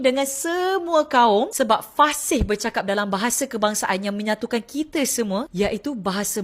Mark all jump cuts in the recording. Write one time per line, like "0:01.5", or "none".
none